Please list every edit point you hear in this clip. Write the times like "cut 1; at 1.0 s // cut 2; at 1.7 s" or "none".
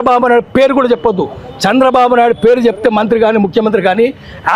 none